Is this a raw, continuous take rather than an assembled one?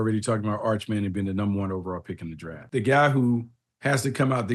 no; 1 cut; at 2.7 s

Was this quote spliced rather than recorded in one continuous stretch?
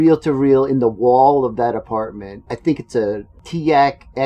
yes; 2 cuts; at 2.3 s, 3.3 s

